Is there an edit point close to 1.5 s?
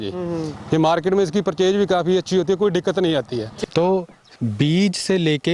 no; 1 cut; at 3.5 s

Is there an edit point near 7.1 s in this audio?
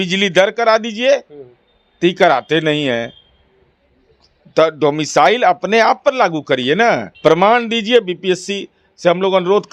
yes; 1 cut; at 7.1 s

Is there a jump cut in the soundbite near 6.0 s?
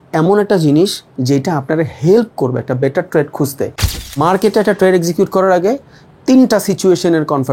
no; 1 cut; at 4.1 s

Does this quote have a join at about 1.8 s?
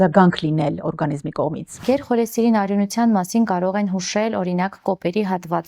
yes; 1 cut; at 1.8 s

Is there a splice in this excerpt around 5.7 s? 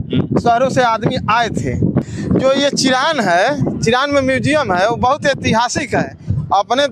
no; 1 cut; at 2.1 s

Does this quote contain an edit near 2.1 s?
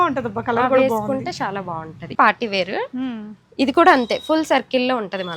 yes; 1 cut; at 2.1 s

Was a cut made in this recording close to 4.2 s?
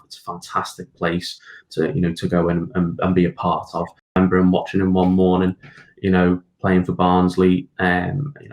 yes; 1 cut; at 4.2 s

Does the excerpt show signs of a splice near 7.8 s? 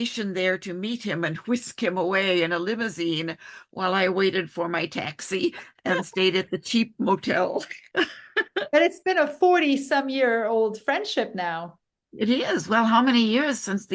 yes; 1 cut; at 7.8 s

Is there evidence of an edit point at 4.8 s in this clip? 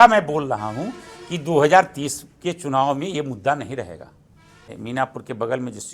yes; 1 cut; at 4.8 s

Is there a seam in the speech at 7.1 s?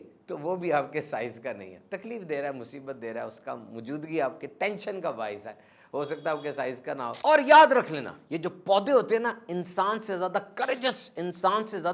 yes; 1 cut; at 7.1 s

